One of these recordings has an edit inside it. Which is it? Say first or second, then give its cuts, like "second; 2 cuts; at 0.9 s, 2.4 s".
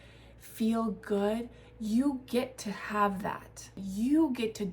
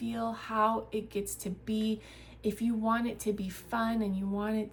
first; 1 cut; at 3.8 s